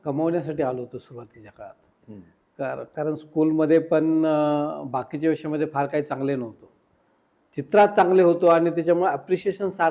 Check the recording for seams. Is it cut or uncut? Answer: uncut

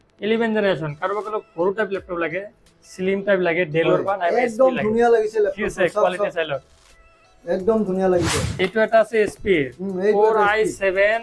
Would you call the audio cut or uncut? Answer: cut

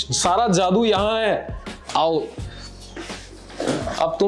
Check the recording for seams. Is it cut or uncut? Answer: uncut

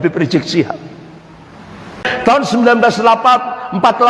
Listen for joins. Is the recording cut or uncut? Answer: cut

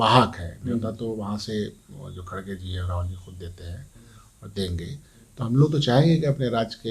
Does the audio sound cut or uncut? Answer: uncut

